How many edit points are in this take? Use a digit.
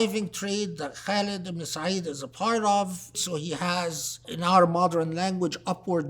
2